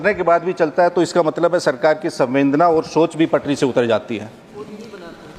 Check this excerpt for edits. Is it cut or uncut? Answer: uncut